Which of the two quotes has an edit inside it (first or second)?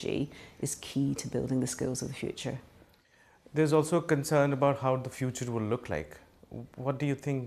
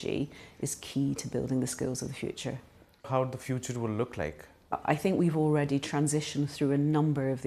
second